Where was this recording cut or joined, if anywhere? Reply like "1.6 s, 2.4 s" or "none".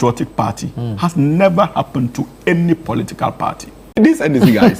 3.8 s

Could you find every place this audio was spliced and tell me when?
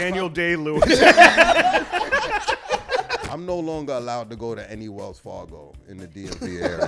3.2 s

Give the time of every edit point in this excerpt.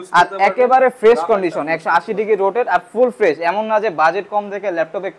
none

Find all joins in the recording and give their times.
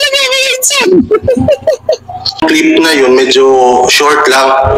2.4 s

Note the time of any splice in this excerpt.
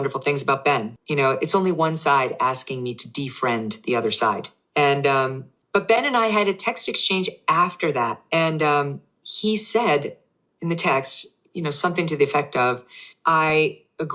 1.0 s

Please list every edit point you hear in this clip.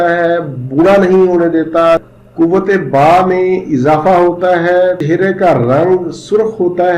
2.0 s, 5.0 s

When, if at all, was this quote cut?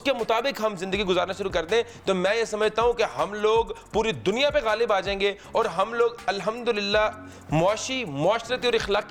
none

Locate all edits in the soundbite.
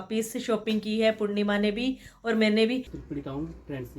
2.9 s

